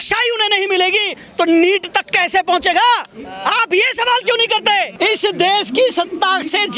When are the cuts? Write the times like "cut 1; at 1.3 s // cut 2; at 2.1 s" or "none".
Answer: cut 1; at 4.9 s